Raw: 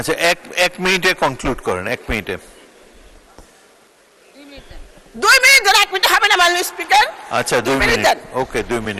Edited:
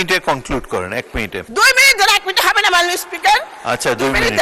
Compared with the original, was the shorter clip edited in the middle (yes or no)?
yes